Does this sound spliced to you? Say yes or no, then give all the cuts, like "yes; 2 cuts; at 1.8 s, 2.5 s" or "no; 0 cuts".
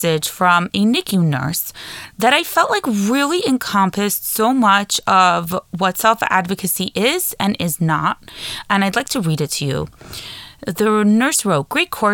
no; 0 cuts